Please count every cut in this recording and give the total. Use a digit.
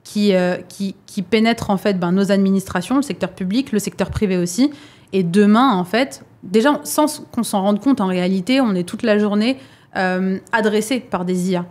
0